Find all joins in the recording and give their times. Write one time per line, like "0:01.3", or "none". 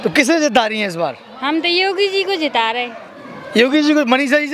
none